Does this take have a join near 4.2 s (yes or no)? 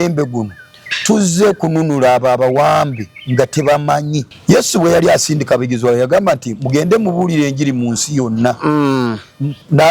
yes